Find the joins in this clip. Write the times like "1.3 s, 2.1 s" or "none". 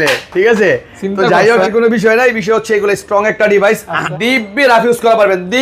1.7 s, 4.1 s